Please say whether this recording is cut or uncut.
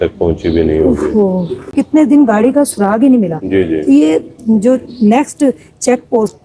cut